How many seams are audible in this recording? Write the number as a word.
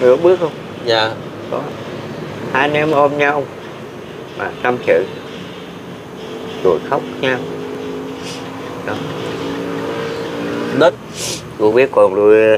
one